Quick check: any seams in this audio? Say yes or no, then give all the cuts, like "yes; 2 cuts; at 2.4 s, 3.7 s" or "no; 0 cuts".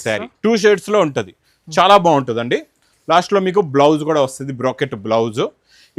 no; 0 cuts